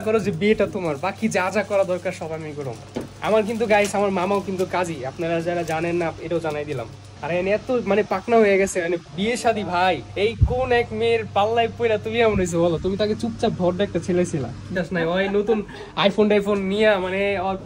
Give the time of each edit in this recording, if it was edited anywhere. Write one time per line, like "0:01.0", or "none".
0:07.1
0:10.1
0:14.7